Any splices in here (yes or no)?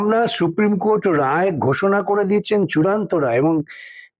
no